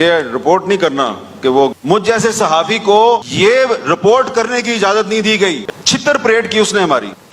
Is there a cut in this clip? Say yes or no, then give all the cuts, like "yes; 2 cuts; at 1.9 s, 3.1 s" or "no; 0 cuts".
yes; 2 cuts; at 1.8 s, 5.7 s